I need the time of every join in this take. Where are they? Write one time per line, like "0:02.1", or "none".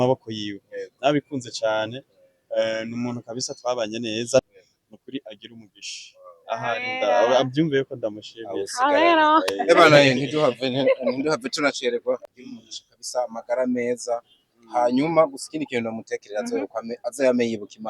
0:04.4
0:12.3